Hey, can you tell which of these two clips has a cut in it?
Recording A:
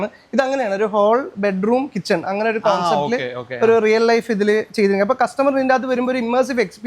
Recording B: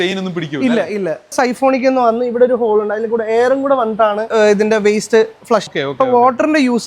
B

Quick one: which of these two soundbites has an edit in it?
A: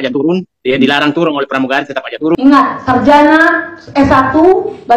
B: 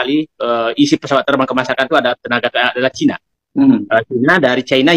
A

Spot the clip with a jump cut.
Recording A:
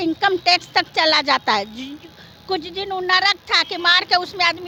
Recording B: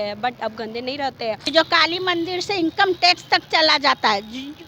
B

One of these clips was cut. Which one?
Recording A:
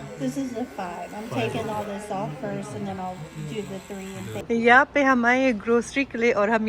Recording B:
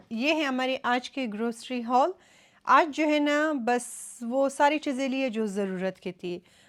A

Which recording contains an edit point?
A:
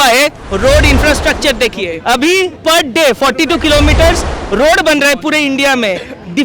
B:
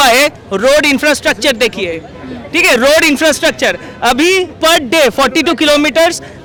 A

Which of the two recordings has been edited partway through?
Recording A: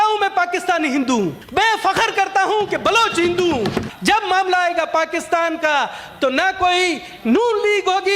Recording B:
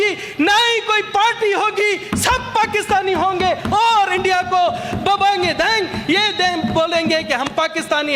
A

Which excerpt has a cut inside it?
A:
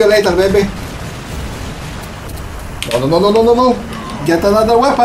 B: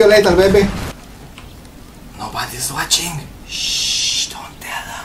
B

